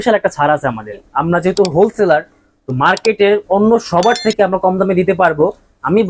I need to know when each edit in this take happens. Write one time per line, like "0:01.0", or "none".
0:01.0